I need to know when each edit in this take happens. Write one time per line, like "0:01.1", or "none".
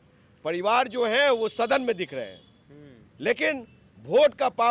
none